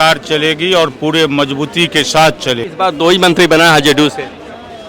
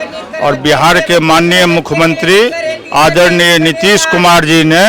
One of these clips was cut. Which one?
first; 1 cut; at 2.7 s

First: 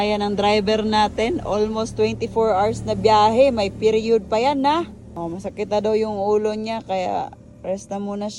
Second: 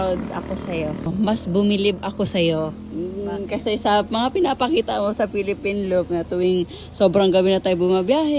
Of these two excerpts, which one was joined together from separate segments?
second; 1 cut; at 1.1 s

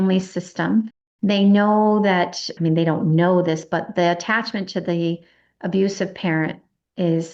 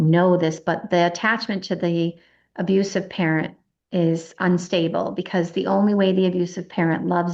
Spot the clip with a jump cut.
first; 1 cut; at 1.0 s

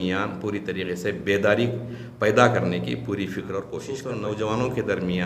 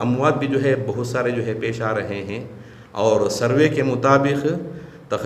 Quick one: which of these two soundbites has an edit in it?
first; 1 cut; at 3.9 s

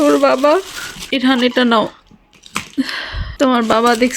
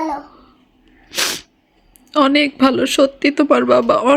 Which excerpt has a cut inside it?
first; 2 cuts; at 1.0 s, 3.2 s

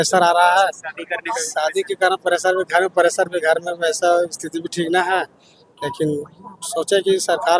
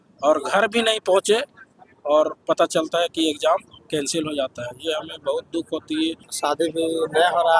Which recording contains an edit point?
second; 1 cut; at 6.3 s

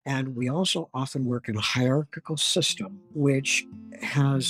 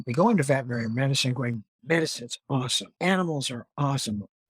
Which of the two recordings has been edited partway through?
second; 1 cut; at 1.7 s

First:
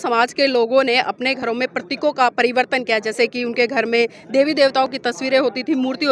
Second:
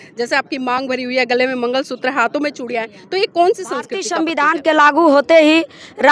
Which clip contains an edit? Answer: second; 1 cut; at 4.1 s

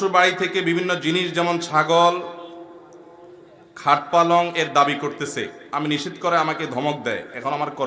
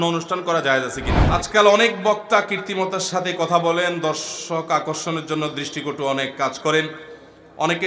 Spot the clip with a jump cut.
second; 1 cut; at 1.1 s

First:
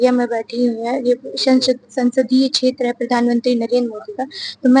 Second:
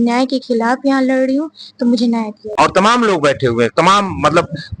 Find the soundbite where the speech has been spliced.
second; 1 cut; at 2.6 s

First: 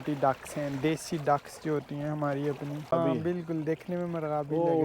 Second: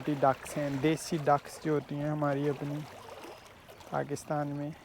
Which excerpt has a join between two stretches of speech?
first; 1 cut; at 2.9 s

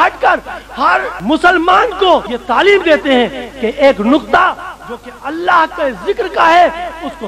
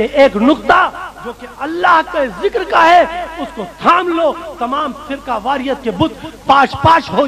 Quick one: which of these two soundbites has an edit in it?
first; 2 cuts; at 1.1 s, 2.3 s

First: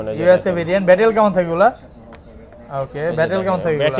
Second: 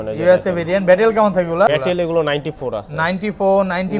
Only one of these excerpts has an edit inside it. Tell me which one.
second; 1 cut; at 1.7 s

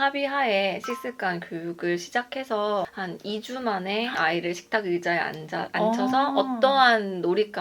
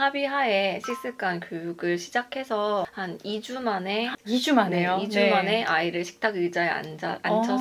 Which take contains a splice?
first; 1 cut; at 4.2 s

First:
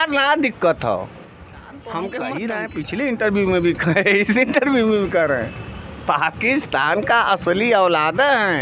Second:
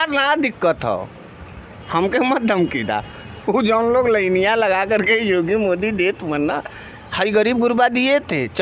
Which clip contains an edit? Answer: first; 1 cut; at 2.7 s

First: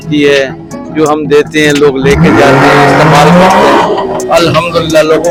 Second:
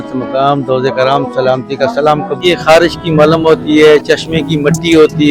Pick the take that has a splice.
second; 1 cut; at 2.4 s

